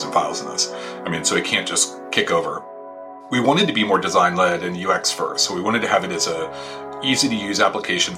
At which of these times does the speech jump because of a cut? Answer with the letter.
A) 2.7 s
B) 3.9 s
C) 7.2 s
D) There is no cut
A